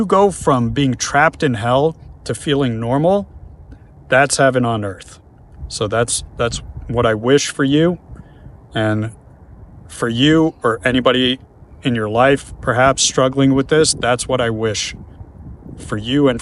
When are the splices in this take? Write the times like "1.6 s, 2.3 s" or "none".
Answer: none